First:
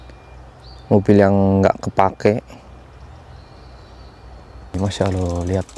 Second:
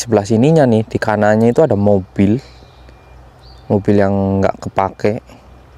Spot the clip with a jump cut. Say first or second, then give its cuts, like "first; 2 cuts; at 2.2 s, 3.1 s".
first; 1 cut; at 4.7 s